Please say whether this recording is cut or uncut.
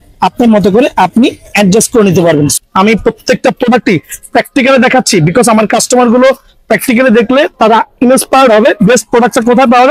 cut